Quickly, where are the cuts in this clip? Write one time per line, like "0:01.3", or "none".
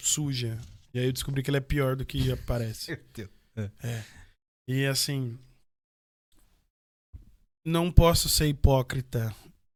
none